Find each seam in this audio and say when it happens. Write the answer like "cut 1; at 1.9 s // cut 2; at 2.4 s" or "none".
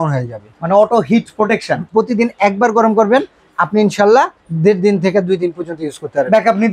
cut 1; at 1.8 s